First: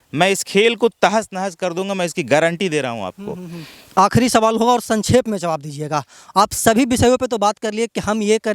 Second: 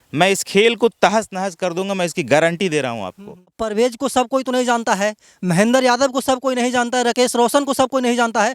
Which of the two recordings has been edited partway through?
second; 1 cut; at 3.6 s

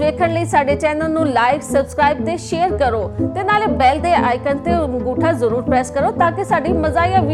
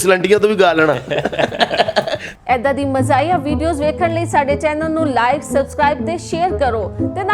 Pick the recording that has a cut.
second; 1 cut; at 2.3 s

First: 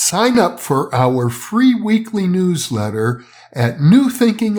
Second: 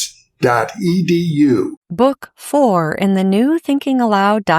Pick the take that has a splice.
second; 1 cut; at 1.8 s

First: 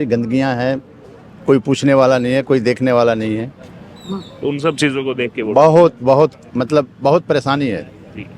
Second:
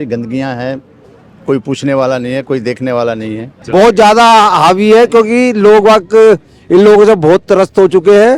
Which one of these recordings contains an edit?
second; 1 cut; at 3.5 s

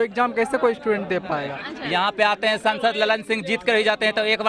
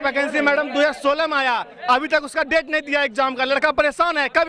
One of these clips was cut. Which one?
first; 1 cut; at 1.6 s

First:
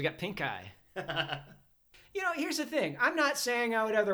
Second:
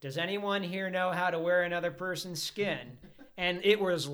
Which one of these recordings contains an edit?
first; 1 cut; at 1.9 s

